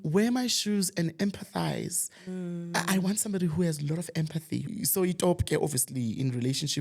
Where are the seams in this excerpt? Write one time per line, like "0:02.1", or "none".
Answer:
0:04.7